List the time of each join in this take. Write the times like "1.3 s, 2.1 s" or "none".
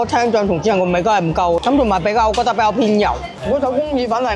3.3 s